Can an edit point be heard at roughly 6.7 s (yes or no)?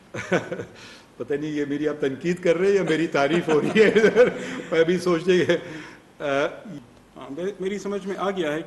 yes